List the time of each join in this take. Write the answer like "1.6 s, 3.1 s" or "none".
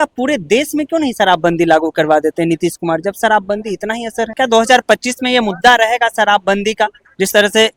4.3 s